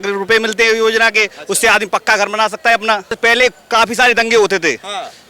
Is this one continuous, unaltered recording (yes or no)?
no